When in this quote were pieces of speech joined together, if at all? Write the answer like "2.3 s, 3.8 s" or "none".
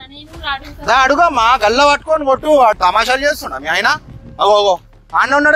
2.8 s